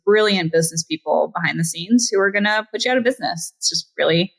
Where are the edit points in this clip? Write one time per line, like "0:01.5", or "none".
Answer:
none

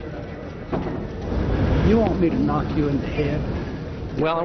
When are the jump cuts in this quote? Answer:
0:01.2

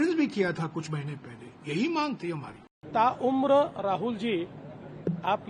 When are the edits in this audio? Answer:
0:02.9

